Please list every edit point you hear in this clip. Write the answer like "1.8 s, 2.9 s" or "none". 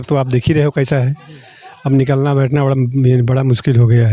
none